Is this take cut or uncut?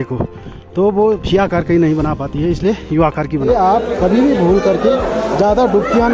cut